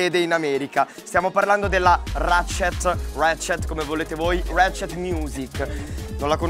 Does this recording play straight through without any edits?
yes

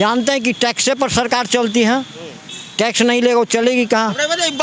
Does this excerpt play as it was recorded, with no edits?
yes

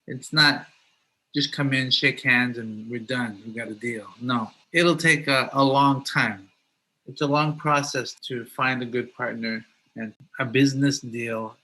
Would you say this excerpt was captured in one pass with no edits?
no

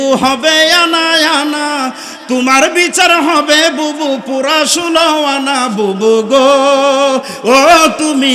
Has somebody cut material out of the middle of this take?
no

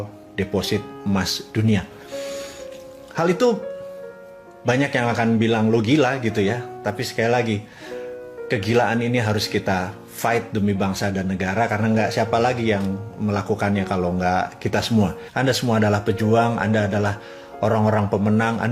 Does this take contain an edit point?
yes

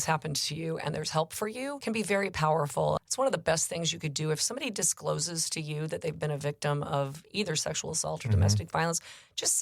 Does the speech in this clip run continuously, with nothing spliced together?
no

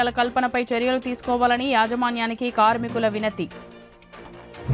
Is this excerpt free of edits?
yes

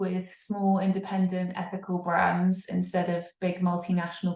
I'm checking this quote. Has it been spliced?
no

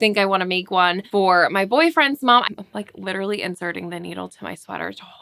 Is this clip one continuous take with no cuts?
no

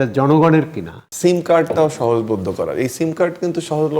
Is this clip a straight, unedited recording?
no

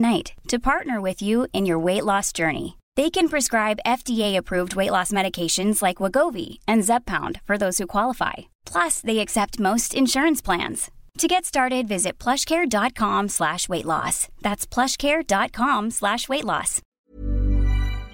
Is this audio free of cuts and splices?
no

